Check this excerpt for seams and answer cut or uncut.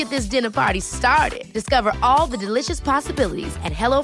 uncut